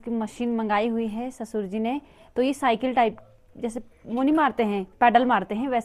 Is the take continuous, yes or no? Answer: yes